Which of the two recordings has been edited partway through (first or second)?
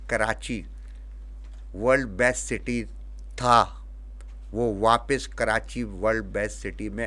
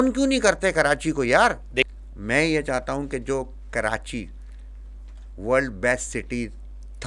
second